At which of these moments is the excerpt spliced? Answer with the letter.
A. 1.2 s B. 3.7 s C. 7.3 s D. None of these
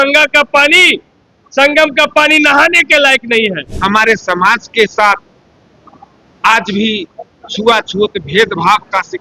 B